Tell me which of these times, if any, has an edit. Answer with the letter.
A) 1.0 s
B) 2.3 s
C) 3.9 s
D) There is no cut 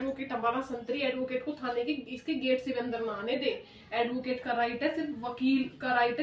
D